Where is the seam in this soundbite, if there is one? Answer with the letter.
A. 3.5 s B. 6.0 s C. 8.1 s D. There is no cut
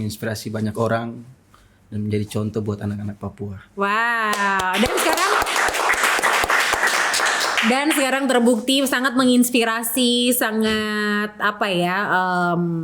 D